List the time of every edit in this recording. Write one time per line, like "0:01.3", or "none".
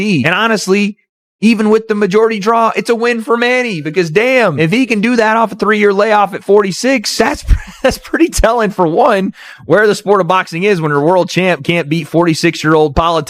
none